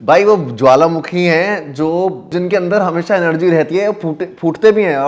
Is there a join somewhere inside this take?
yes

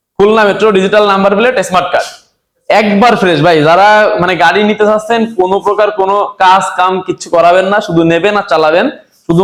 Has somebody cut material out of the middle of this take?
no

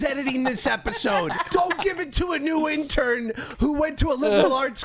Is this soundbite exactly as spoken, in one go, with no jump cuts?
no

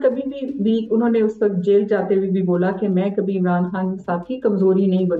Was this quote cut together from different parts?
no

